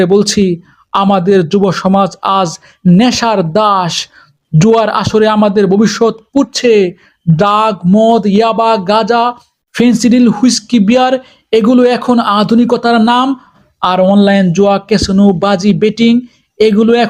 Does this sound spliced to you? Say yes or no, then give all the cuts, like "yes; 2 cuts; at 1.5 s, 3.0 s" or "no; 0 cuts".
no; 0 cuts